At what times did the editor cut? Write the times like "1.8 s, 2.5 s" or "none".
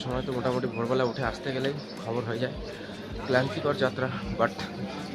none